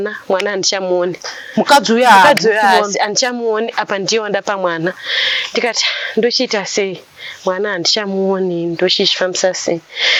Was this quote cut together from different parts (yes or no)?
no